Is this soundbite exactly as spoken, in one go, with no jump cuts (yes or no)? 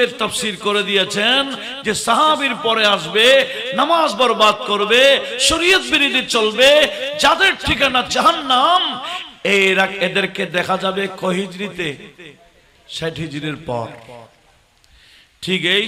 yes